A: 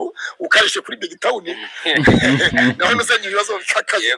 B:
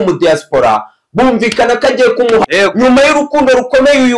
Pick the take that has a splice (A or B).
B